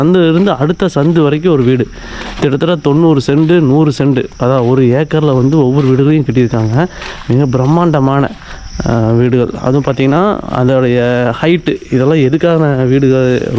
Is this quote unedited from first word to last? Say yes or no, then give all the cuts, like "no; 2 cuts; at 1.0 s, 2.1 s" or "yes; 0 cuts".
yes; 0 cuts